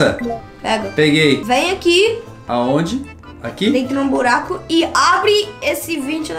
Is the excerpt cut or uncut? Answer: cut